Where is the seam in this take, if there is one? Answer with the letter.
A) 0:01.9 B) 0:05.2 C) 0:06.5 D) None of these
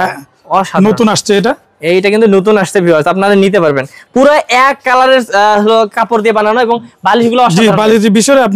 D